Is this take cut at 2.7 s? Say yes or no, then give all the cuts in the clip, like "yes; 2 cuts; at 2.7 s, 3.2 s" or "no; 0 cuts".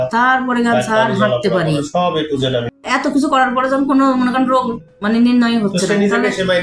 yes; 1 cut; at 2.7 s